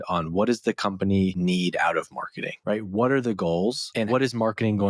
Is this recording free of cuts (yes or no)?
no